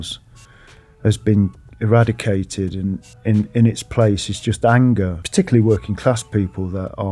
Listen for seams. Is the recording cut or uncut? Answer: cut